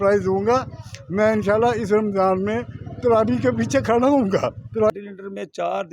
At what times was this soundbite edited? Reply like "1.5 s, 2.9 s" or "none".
4.9 s